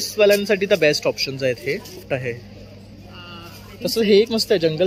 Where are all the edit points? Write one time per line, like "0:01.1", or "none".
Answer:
0:02.0

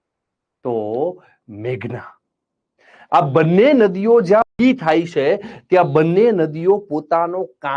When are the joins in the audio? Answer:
0:04.5

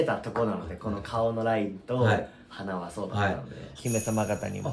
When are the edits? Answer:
0:03.8

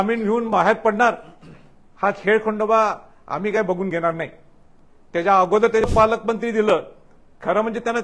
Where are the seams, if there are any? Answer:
0:05.8

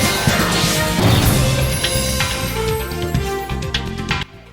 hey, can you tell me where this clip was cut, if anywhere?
0:01.8

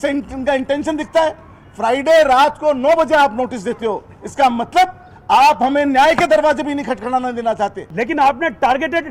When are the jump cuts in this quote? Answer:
0:07.8

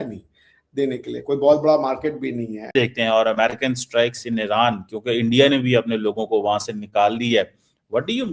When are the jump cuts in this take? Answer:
0:02.7

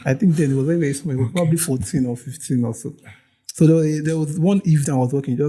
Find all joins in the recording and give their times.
none

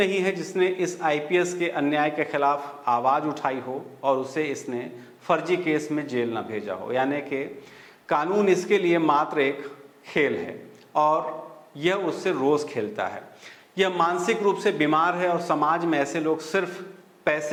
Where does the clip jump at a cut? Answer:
none

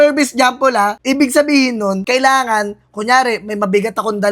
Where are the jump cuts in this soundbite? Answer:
0:01.0
0:02.0

